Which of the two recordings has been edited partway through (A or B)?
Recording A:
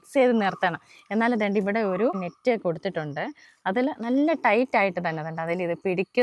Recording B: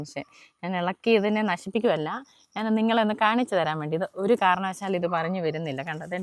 A